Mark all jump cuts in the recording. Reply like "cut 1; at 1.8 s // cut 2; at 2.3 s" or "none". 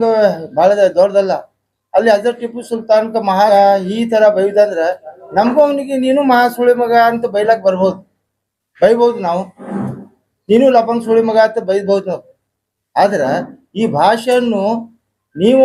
none